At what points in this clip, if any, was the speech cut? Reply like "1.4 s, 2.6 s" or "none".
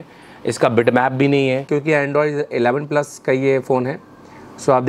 1.6 s